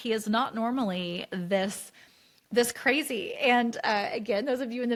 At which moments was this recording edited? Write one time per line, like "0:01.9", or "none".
none